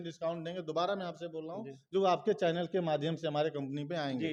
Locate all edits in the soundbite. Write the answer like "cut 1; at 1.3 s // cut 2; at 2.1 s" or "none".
none